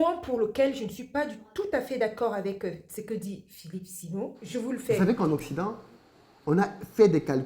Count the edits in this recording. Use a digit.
1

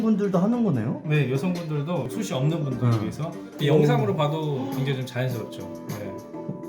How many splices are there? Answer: 1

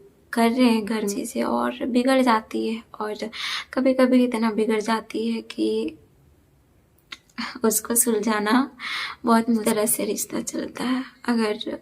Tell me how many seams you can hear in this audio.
2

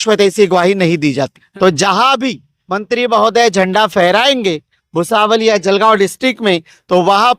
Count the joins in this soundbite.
1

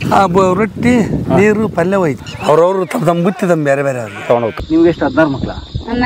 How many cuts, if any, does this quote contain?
2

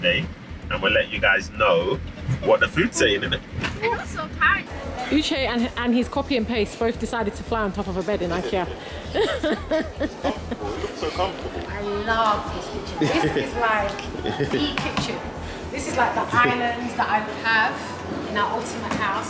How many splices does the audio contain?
2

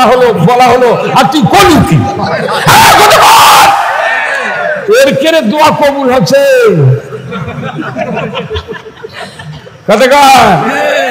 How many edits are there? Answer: 0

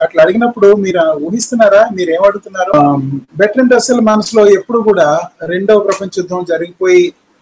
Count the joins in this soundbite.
1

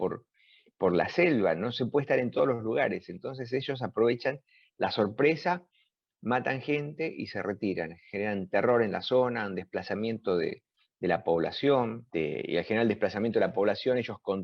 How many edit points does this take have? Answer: 1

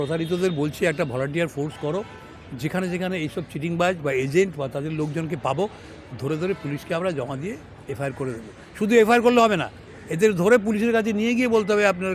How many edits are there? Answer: 0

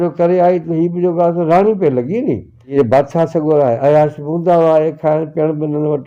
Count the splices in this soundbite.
1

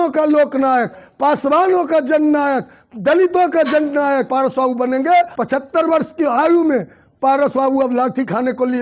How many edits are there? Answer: 2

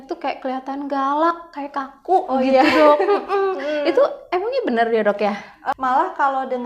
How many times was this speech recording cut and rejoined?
1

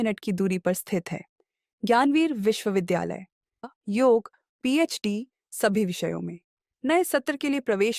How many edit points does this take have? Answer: 1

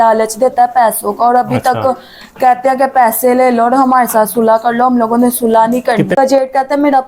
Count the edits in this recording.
1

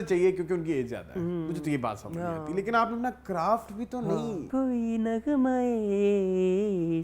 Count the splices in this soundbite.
1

